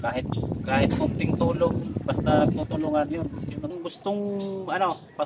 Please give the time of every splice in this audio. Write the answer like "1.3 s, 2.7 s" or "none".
3.7 s